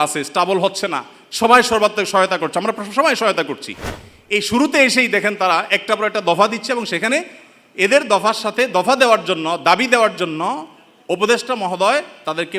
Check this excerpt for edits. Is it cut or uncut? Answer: uncut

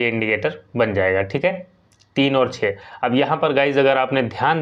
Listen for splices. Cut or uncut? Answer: uncut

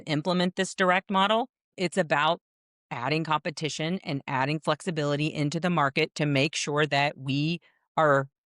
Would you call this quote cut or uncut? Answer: cut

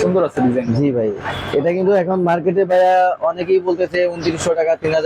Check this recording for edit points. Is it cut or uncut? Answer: uncut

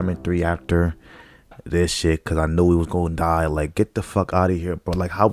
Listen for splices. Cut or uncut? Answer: uncut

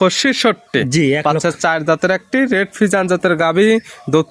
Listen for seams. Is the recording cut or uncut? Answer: uncut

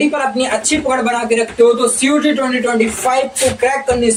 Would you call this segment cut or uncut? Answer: uncut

